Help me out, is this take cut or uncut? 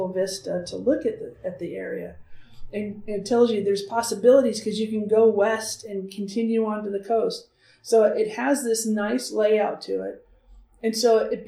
uncut